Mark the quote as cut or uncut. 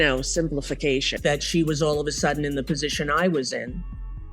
cut